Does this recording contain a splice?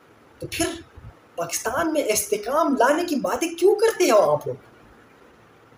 no; 0 cuts

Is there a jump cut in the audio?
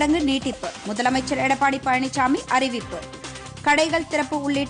no; 0 cuts

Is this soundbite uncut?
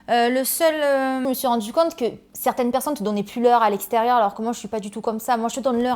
no; 1 cut; at 1.2 s

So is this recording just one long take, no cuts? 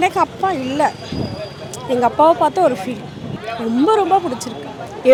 yes; 0 cuts

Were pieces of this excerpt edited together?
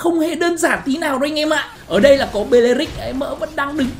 yes; 1 cut; at 1.8 s

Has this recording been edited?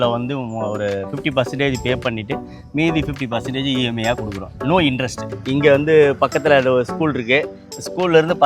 yes; 1 cut; at 5.3 s

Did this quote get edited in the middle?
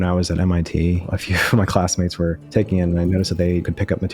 yes; 1 cut; at 1.1 s

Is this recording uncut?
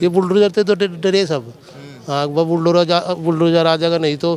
yes; 0 cuts

